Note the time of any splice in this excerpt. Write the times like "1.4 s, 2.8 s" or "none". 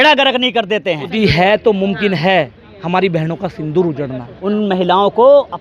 1.1 s, 4.3 s